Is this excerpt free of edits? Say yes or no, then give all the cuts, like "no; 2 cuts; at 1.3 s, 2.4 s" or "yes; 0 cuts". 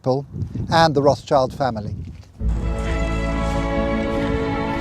no; 1 cut; at 1.8 s